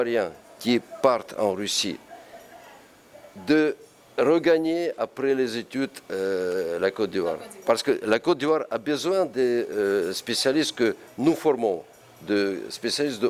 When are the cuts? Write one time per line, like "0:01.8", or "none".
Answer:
none